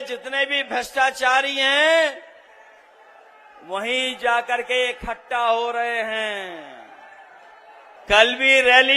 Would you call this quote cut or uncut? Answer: cut